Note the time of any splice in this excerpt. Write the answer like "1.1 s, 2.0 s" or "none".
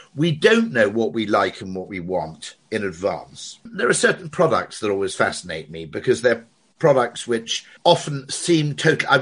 3.6 s, 7.7 s